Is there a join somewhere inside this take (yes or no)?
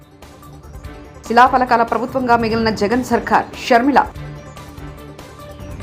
no